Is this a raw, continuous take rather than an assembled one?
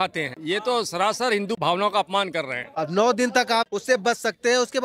no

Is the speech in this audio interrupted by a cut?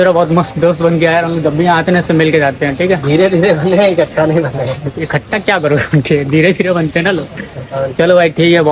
no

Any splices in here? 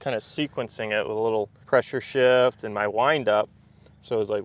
yes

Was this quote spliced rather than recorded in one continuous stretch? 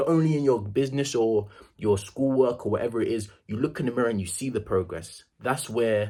no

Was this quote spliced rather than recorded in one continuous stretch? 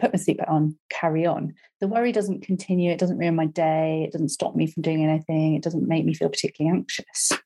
no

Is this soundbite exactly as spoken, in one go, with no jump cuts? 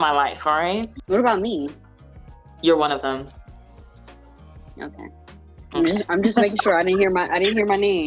no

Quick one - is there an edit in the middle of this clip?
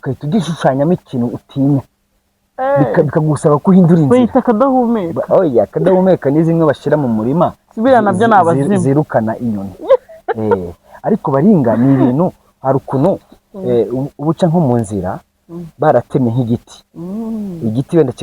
no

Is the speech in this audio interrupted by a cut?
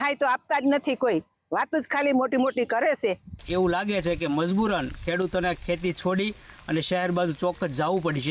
yes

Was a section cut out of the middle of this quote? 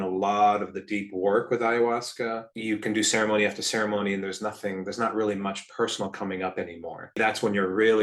yes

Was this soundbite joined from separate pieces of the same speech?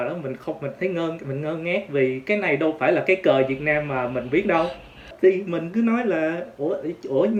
no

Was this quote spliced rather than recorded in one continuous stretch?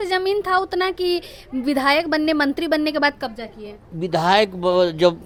no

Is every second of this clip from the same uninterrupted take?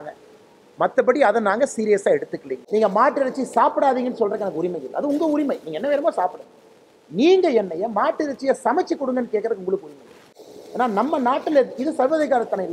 no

